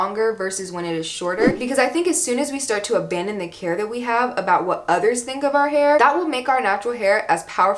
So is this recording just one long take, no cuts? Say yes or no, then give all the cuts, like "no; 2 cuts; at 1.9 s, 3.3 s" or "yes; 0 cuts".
no; 2 cuts; at 1.6 s, 6.0 s